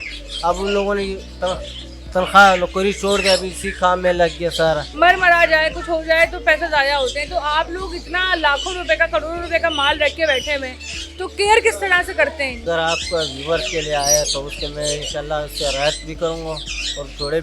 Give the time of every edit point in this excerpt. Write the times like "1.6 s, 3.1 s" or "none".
4.9 s, 12.6 s